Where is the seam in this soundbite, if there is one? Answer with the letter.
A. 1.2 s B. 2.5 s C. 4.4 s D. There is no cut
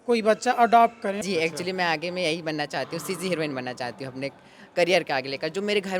A